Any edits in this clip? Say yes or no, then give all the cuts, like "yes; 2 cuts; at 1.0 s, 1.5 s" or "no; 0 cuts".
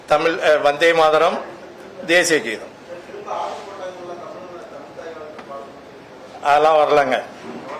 no; 0 cuts